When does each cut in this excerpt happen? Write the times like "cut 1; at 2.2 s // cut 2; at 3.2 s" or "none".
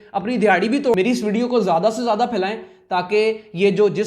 cut 1; at 0.9 s